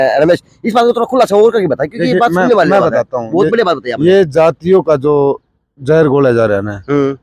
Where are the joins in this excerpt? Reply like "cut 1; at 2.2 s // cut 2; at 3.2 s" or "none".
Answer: none